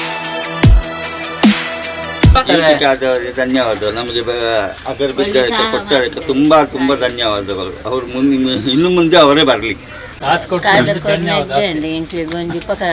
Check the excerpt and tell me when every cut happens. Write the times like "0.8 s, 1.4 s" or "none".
2.4 s